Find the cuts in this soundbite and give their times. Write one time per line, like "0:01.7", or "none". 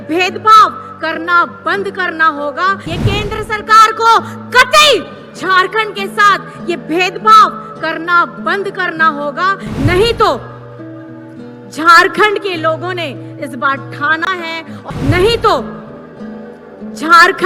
0:02.8
0:14.9